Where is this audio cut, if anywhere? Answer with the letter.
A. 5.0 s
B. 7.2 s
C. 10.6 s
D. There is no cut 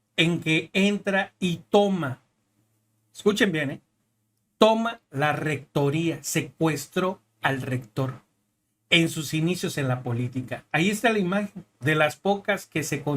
C